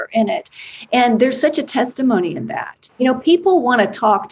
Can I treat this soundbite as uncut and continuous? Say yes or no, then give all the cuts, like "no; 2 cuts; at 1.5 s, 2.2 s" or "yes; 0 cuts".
no; 1 cut; at 2.8 s